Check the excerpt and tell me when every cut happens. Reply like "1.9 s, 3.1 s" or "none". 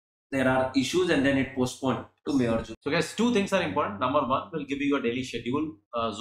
2.7 s